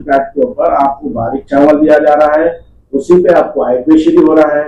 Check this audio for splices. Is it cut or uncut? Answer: uncut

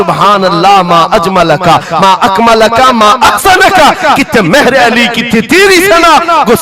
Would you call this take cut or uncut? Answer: uncut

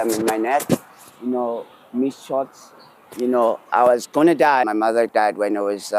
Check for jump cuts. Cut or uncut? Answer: cut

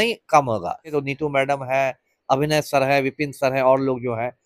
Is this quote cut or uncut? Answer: cut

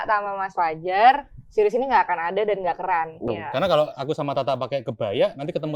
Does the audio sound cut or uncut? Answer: cut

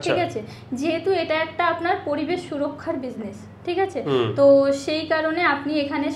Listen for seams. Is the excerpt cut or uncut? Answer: uncut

